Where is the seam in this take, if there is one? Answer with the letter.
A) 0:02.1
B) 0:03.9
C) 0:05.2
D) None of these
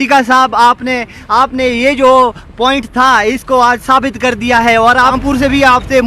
C